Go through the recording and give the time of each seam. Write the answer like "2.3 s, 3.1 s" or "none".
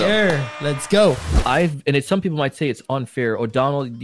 1.3 s

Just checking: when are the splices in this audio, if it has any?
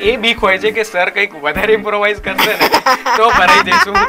none

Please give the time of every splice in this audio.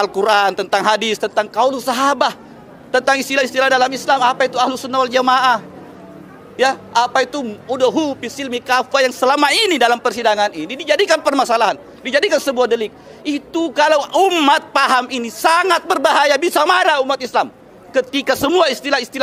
none

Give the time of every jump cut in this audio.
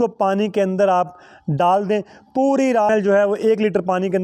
2.9 s

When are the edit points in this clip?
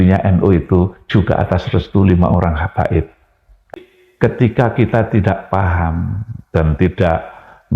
3.7 s

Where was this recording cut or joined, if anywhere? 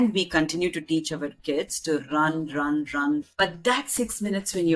3.3 s

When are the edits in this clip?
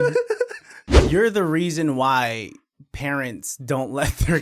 0.9 s

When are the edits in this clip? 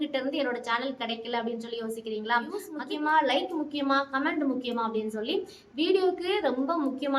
2.7 s

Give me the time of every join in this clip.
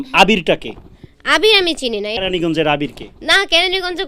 2.2 s

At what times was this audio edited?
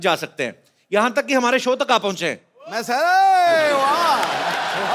none

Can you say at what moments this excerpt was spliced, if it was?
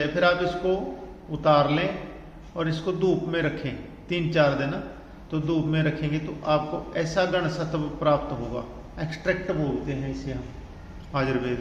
none

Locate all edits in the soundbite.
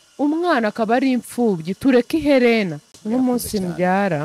2.9 s

